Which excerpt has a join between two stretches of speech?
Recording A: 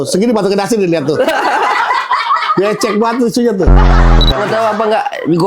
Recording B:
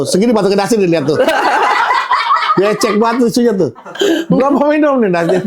A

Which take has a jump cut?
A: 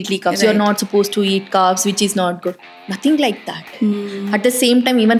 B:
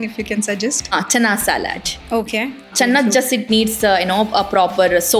B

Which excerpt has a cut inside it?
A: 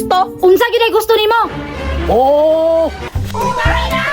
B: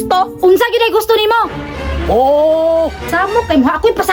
A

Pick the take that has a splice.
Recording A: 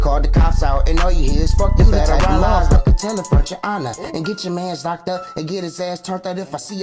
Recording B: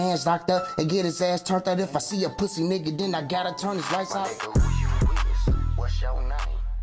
A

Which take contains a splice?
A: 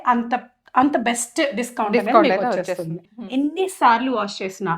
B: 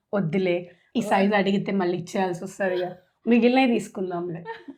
A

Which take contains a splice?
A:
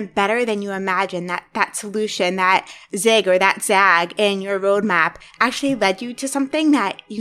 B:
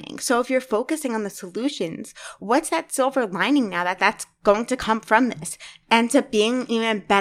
B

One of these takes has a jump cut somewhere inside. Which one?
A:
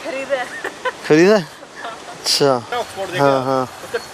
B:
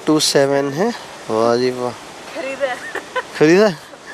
A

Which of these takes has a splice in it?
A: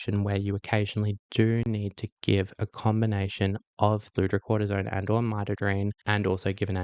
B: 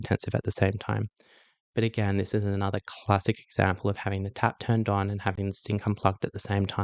A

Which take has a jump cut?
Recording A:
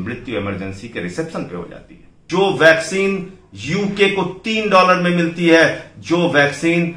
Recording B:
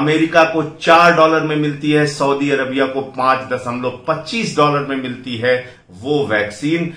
A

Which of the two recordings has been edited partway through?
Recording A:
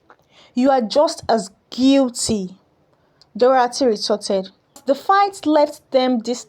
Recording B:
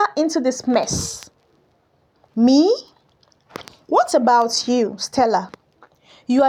A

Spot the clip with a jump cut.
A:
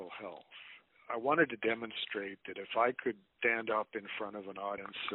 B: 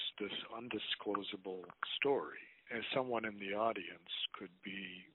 A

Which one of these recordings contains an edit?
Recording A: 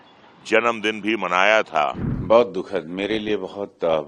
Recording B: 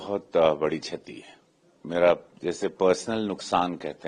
A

